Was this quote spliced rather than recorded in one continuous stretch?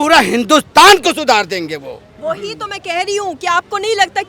no; 0 cuts

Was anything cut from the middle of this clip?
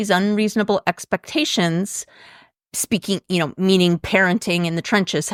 no; 0 cuts

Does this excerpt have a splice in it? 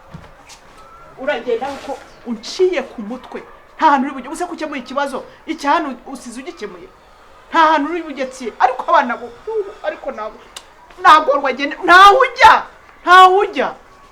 no; 0 cuts

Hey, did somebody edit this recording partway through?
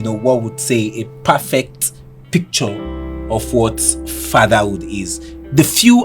no; 0 cuts

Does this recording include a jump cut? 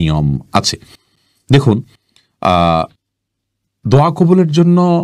no; 0 cuts

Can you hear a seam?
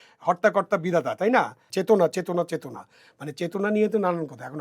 yes; 1 cut; at 1.6 s

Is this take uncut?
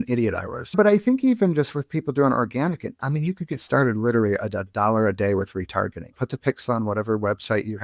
no; 2 cuts; at 0.7 s, 6.1 s

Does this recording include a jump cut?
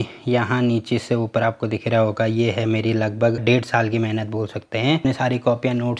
yes; 2 cuts; at 3.4 s, 5.0 s

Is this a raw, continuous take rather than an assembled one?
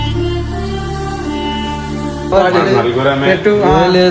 no; 1 cut; at 2.3 s

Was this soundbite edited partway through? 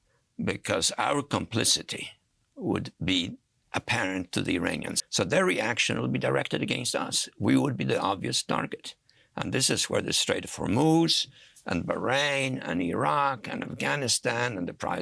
yes; 1 cut; at 5.0 s

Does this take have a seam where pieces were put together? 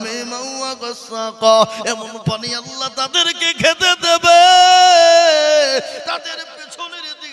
no; 0 cuts

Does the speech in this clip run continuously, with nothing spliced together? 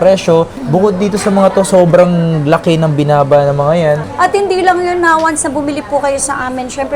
no; 1 cut; at 4.0 s

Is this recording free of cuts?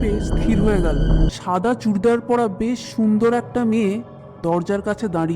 no; 1 cut; at 1.3 s

